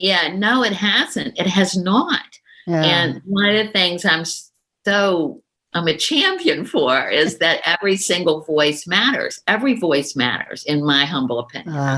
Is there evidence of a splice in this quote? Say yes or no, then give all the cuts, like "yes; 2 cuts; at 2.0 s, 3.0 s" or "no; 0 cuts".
no; 0 cuts